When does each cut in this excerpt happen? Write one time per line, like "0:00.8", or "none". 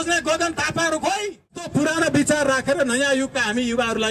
0:01.7